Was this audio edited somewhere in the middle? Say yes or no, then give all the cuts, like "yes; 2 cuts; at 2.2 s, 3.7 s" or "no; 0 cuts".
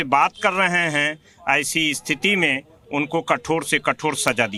no; 0 cuts